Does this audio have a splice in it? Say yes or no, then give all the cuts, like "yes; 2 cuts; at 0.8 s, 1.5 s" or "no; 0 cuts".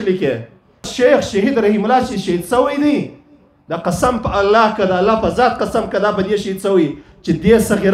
yes; 1 cut; at 0.9 s